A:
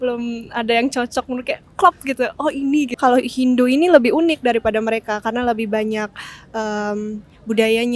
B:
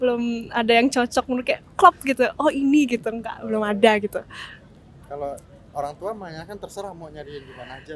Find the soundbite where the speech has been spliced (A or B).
A